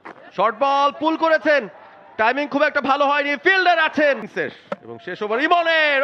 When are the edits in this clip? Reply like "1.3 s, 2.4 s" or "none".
4.3 s